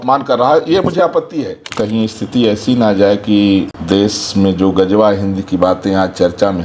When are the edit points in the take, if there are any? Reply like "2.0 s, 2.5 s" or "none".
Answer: 1.7 s, 3.8 s